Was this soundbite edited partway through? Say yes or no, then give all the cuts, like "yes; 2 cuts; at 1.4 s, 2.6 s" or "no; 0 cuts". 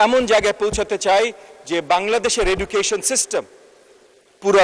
no; 0 cuts